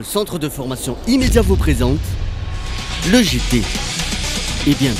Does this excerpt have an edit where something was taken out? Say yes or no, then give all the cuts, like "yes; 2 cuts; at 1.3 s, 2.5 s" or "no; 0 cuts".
no; 0 cuts